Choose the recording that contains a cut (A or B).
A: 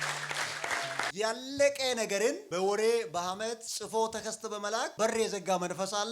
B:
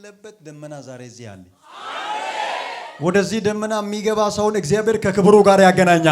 A